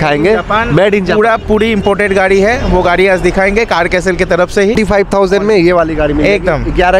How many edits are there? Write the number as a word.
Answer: one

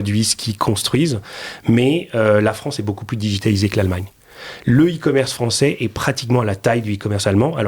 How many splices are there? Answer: zero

